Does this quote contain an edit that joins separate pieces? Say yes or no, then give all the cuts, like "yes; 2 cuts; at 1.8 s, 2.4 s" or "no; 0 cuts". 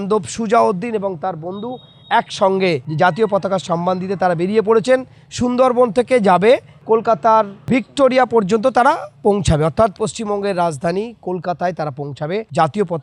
yes; 1 cut; at 2.9 s